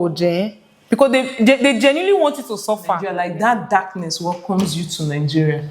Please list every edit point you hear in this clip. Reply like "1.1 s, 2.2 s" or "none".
3.2 s